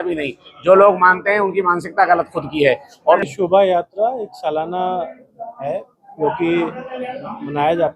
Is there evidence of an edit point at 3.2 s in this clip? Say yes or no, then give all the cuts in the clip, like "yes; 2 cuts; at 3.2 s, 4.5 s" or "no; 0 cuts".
yes; 1 cut; at 3.2 s